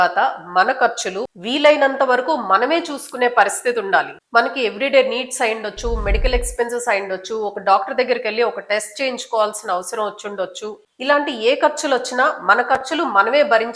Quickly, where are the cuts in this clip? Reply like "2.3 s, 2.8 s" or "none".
none